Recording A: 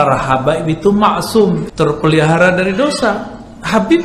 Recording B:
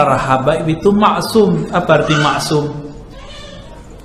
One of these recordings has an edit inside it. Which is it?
A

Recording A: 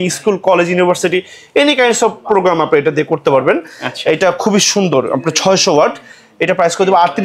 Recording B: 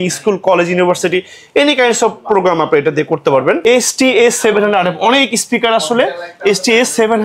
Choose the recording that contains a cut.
B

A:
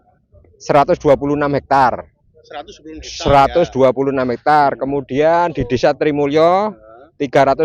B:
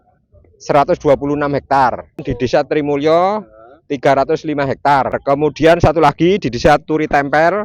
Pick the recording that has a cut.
B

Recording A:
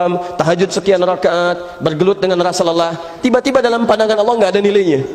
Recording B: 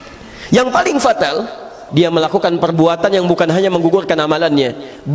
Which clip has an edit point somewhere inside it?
B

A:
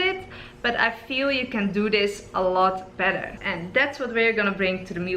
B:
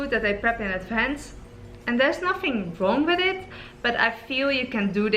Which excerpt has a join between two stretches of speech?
A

